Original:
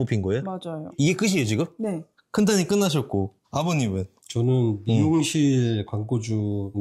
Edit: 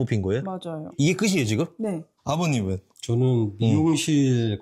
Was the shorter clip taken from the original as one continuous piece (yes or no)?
no